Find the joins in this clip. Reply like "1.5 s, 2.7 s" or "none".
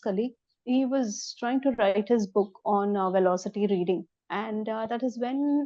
4.2 s